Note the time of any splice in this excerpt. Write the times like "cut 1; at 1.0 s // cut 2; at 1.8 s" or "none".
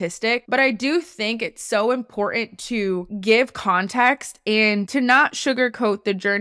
cut 1; at 4.9 s